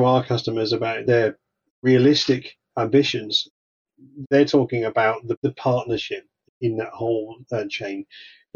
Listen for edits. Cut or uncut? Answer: cut